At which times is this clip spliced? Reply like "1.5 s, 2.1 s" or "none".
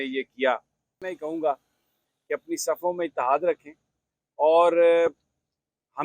1.0 s

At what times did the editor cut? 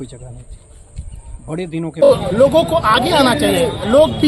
2.1 s

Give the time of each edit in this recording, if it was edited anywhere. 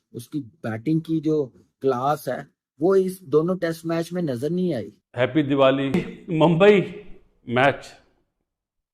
5.0 s, 6.0 s

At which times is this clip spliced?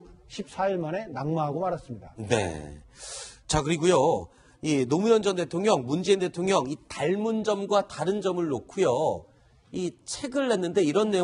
1.3 s

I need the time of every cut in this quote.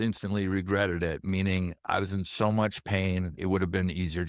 3.4 s

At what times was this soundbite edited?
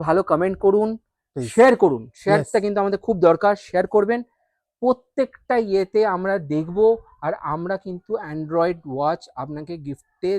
none

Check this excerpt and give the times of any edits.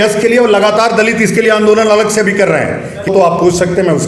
3.1 s

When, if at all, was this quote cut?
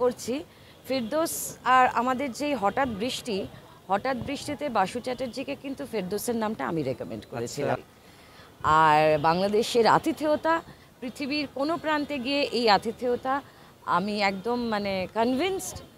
7.8 s

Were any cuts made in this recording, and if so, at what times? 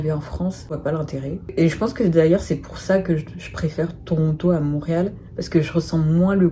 none

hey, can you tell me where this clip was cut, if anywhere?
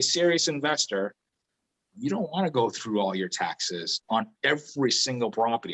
4.0 s

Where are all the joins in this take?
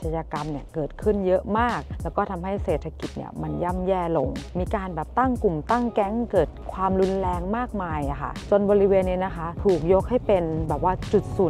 none

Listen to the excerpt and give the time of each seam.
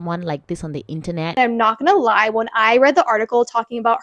1.3 s

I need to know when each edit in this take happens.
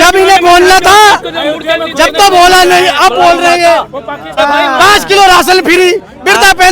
4.4 s

